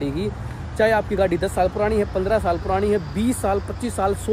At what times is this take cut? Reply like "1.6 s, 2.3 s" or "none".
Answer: none